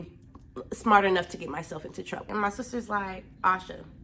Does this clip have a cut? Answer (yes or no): yes